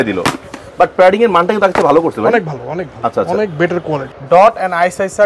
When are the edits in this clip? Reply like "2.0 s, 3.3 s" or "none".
4.1 s